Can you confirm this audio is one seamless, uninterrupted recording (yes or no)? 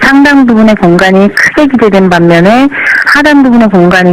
no